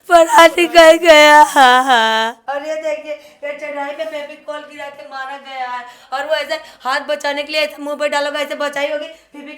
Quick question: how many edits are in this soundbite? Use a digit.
1